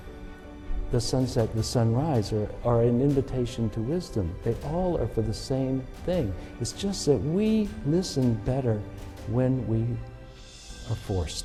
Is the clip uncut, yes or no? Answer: yes